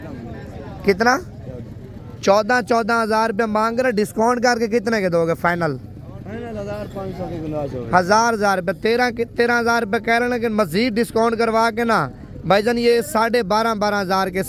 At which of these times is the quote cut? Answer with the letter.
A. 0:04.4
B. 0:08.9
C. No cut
C